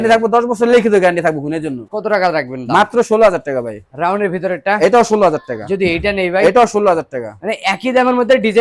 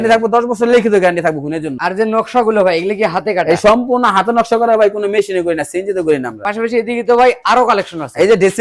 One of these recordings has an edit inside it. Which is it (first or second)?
second